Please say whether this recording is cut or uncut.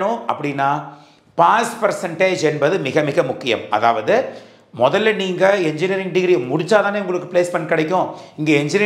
uncut